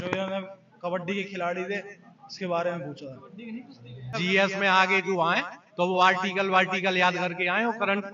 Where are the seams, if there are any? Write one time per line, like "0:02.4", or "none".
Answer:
0:04.1